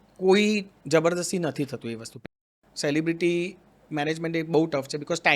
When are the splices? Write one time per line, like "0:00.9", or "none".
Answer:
0:02.3

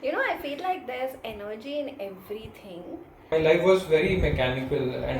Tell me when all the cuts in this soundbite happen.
0:03.3

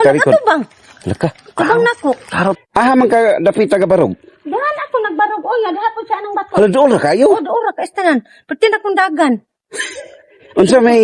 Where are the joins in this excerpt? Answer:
0:02.6

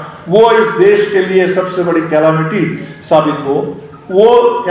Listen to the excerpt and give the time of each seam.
none

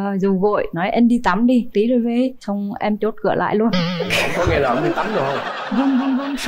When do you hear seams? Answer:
none

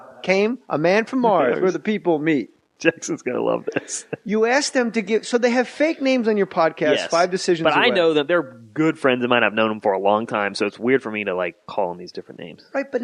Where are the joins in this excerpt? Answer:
none

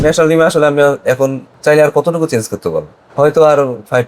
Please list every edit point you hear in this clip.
0:01.5
0:03.0

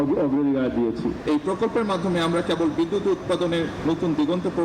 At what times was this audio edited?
0:01.2

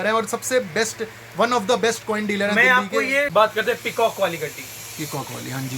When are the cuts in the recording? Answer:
0:03.3

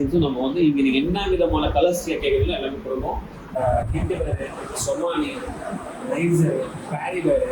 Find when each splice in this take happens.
0:03.6

